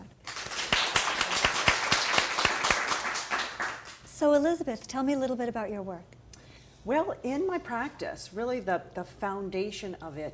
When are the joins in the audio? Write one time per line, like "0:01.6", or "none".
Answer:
0:05.7